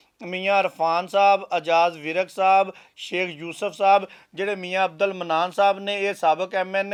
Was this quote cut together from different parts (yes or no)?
no